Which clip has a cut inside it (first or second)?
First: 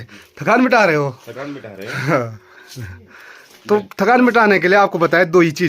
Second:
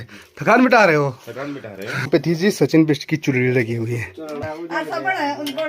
second